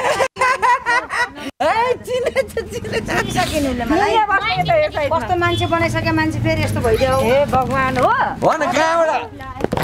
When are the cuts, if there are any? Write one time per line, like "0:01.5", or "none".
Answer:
none